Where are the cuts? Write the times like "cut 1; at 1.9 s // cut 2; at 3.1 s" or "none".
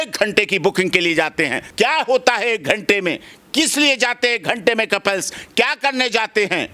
cut 1; at 1.6 s